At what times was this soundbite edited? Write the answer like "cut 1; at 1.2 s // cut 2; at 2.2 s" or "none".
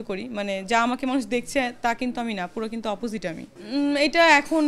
cut 1; at 3.5 s